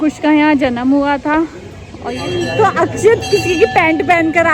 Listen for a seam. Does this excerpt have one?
yes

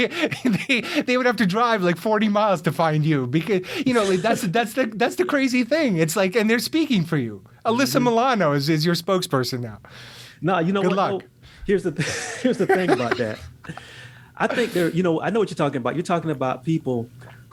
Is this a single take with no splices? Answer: yes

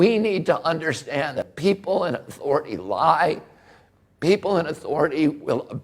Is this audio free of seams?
no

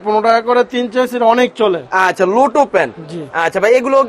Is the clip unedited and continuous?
yes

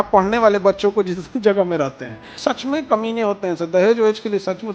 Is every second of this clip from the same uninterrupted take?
no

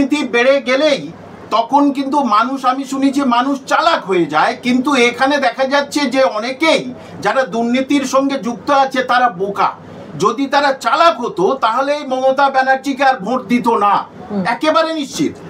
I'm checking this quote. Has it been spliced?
no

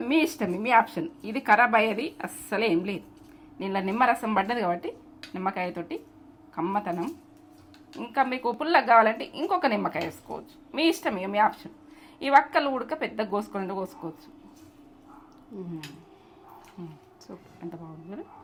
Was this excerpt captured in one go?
yes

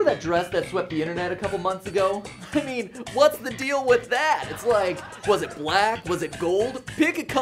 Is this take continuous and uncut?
yes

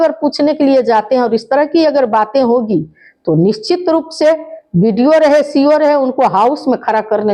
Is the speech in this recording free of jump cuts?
yes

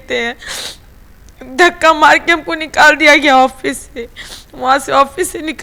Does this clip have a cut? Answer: no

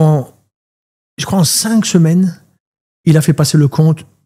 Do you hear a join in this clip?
no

